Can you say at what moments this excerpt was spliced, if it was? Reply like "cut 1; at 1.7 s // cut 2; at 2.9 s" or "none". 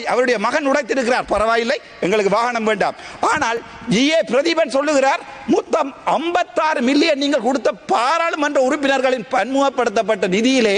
none